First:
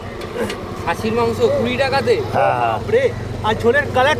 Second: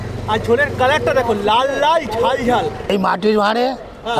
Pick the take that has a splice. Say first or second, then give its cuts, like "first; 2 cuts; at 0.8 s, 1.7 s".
second; 1 cut; at 2.9 s